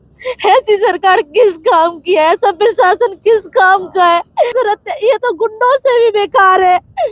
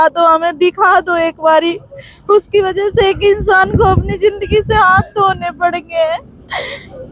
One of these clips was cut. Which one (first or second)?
first